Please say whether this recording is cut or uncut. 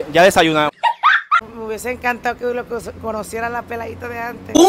cut